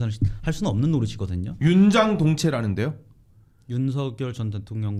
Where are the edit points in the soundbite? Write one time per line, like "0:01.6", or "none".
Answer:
none